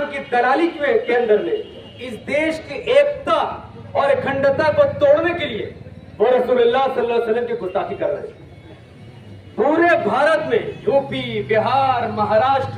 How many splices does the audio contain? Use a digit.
0